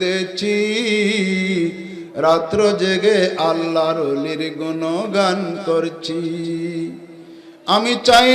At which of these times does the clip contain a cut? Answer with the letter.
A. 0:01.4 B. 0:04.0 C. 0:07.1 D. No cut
D